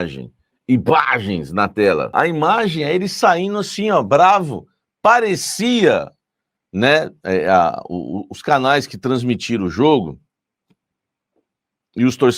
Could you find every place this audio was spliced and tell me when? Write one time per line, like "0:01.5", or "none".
0:02.1